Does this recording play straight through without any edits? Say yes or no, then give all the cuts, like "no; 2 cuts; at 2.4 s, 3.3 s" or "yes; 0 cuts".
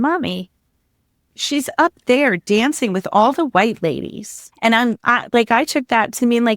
yes; 0 cuts